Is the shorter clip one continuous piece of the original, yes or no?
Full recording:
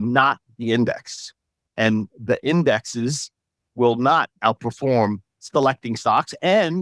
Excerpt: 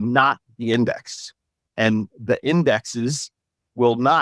yes